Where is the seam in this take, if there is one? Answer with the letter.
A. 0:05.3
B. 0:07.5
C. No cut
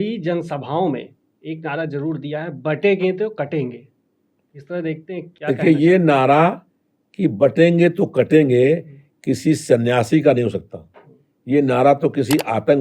A